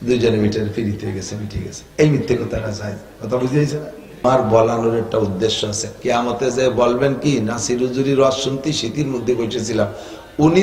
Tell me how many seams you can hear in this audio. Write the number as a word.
one